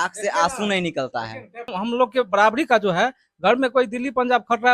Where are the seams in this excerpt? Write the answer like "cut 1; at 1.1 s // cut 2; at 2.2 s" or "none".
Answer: cut 1; at 1.8 s

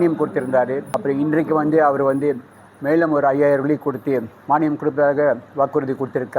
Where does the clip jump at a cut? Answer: cut 1; at 0.9 s // cut 2; at 4.3 s

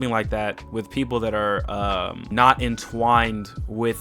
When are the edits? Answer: cut 1; at 2.3 s

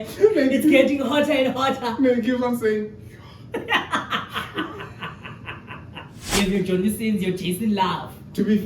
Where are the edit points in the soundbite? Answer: cut 1; at 6.2 s

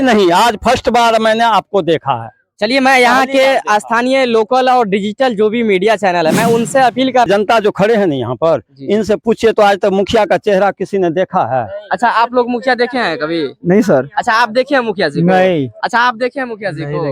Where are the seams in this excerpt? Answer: cut 1; at 7.3 s

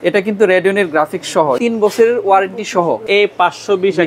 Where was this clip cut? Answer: cut 1; at 1.6 s // cut 2; at 3.1 s

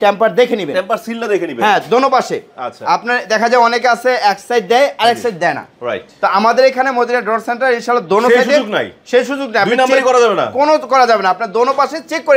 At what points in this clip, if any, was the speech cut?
none

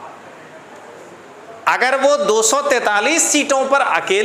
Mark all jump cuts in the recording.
none

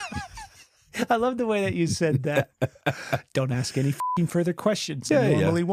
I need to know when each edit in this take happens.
none

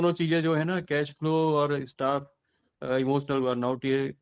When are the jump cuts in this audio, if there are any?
none

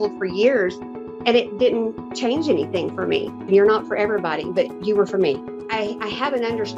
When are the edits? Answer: cut 1; at 3.5 s // cut 2; at 5.6 s

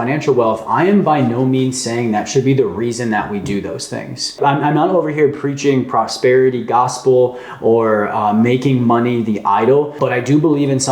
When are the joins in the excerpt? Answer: cut 1; at 4.3 s // cut 2; at 9.9 s

